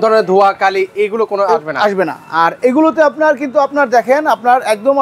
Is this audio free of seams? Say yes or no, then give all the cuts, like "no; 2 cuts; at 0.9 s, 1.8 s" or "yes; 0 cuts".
yes; 0 cuts